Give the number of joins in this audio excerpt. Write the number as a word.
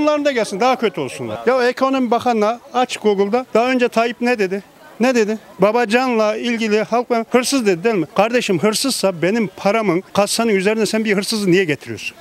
zero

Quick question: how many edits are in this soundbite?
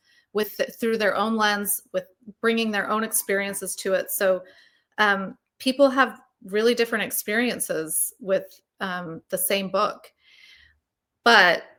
zero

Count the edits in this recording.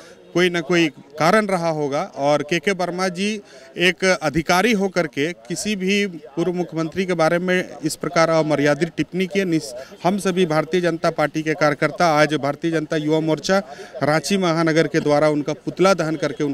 zero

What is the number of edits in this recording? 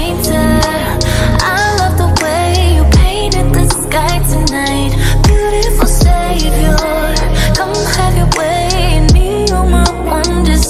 zero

